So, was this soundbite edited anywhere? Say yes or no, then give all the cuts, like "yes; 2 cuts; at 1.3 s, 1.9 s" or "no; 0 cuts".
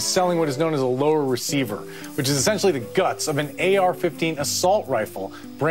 no; 0 cuts